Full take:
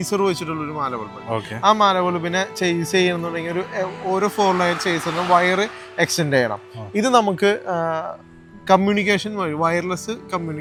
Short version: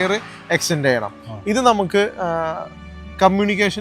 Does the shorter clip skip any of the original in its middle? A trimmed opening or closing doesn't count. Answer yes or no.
no